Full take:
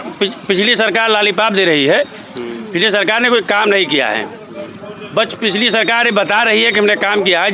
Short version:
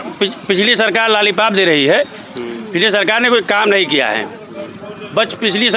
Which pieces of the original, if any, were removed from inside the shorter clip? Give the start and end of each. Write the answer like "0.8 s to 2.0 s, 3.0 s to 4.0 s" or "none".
none